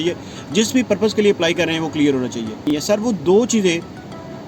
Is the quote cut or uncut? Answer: cut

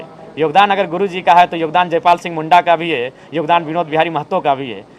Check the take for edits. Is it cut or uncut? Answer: uncut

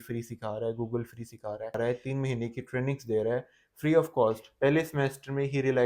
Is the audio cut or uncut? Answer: cut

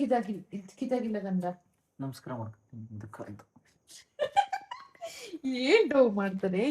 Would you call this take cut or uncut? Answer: cut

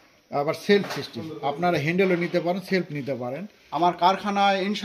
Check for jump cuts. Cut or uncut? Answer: cut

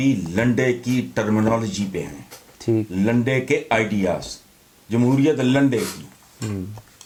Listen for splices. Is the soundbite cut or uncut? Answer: uncut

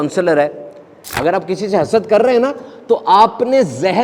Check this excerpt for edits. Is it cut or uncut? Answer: cut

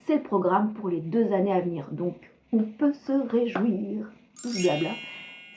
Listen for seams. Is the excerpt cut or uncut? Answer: cut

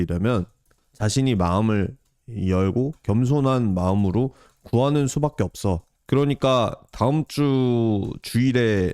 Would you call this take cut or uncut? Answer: cut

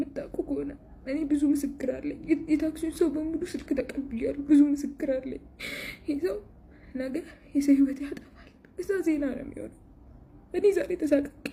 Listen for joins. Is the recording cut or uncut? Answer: uncut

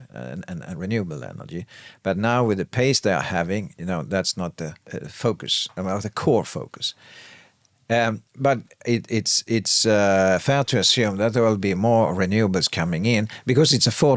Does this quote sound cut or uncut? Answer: cut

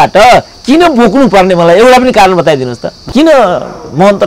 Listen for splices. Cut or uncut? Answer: cut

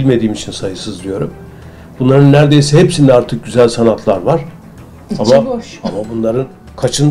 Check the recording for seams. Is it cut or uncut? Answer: uncut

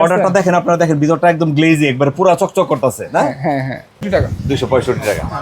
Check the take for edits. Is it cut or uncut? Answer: cut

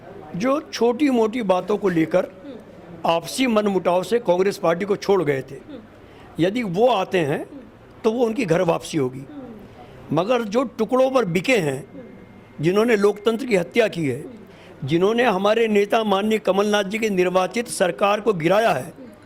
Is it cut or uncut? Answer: uncut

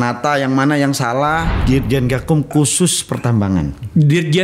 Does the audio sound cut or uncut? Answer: cut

